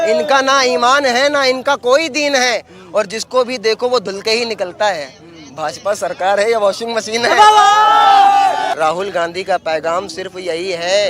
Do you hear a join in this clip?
yes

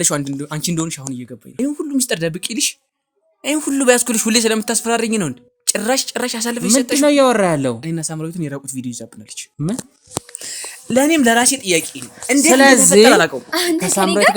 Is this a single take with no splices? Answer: no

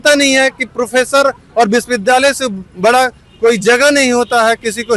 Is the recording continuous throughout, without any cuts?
yes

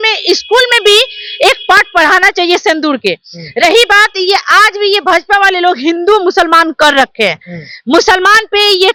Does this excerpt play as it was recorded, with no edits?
yes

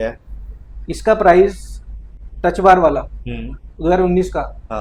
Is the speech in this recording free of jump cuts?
yes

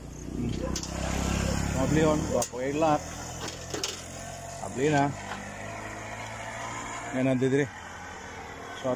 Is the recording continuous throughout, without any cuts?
yes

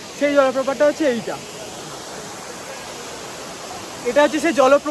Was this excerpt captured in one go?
yes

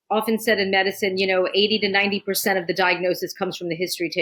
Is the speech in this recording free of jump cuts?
yes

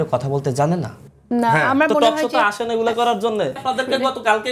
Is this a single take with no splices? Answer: no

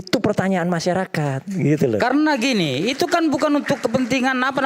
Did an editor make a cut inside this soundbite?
no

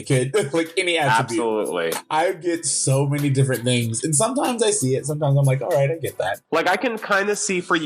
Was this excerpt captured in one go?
no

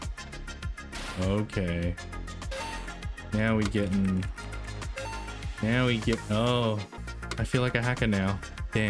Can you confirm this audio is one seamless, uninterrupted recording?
no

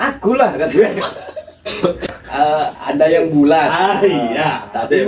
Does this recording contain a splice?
yes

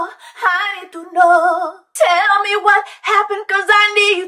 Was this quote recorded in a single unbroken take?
no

